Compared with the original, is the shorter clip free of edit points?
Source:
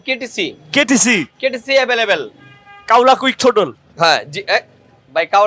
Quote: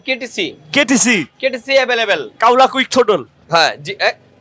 no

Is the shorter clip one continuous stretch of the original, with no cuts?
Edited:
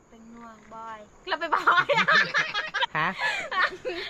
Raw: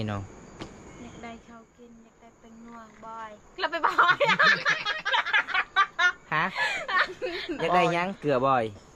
no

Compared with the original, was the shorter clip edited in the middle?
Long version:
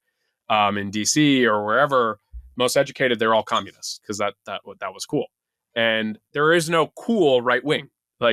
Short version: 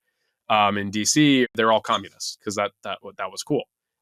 yes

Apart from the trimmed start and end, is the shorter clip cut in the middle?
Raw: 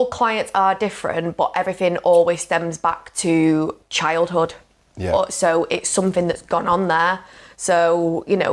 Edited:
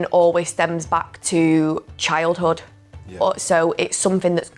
no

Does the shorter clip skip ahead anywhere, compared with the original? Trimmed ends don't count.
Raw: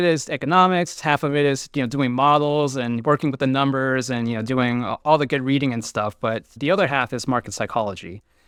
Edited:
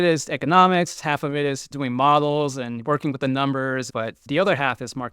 yes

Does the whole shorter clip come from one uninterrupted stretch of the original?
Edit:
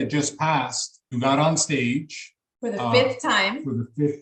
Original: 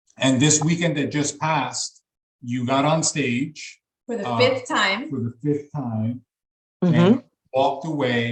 no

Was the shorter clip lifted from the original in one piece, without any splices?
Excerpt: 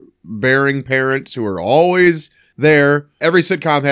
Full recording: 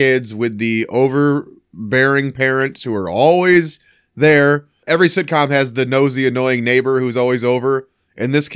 no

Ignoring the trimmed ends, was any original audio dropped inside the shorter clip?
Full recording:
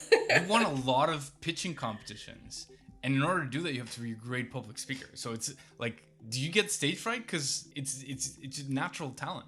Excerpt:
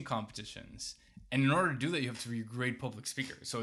no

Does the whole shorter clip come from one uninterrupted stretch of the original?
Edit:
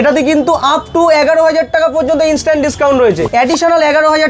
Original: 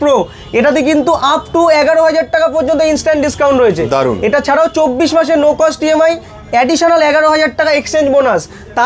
no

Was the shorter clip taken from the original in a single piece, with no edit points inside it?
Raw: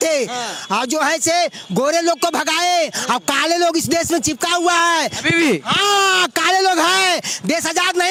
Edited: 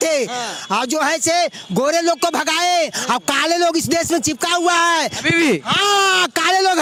yes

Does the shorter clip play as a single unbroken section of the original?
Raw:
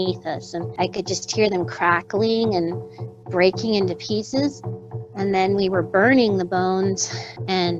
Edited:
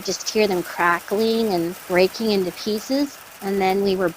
no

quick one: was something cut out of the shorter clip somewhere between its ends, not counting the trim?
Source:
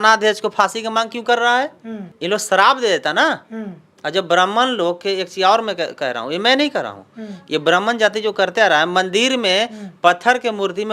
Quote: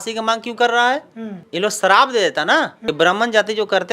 yes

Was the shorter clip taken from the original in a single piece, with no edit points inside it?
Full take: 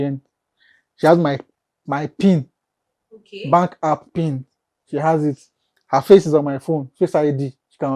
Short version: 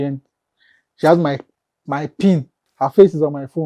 no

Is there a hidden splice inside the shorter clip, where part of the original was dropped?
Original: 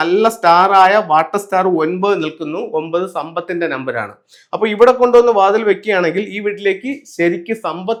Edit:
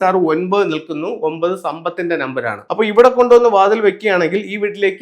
yes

